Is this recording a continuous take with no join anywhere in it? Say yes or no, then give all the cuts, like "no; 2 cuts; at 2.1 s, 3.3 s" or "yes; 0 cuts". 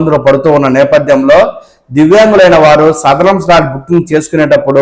yes; 0 cuts